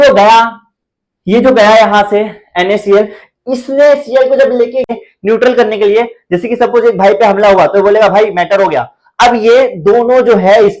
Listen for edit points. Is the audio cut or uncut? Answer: cut